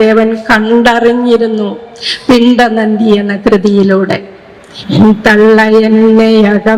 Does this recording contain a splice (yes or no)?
no